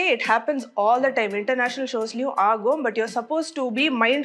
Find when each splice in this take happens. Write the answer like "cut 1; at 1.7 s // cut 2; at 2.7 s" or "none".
none